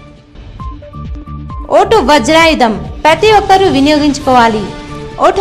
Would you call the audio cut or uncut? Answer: cut